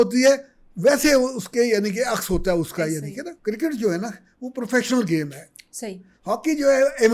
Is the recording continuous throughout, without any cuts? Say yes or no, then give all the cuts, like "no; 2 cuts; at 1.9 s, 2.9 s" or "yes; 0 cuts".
no; 1 cut; at 3.3 s